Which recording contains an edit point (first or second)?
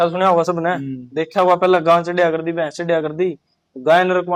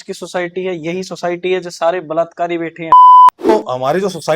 second